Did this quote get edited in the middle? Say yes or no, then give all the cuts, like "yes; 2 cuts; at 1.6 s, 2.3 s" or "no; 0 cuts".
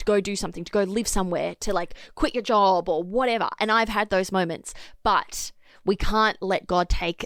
no; 0 cuts